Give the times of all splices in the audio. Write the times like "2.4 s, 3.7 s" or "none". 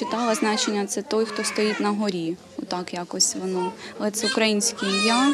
none